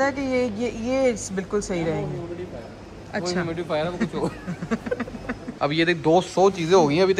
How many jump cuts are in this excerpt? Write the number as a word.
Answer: one